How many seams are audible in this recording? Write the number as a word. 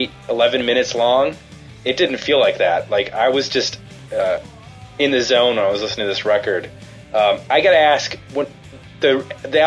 zero